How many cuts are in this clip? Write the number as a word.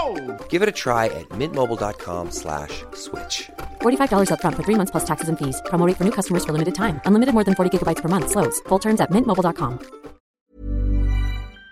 one